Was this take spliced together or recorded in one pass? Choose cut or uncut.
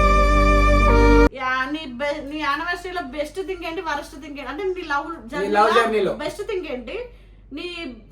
cut